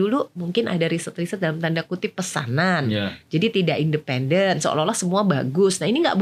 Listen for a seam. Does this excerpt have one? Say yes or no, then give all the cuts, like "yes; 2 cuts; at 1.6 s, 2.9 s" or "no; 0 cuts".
no; 0 cuts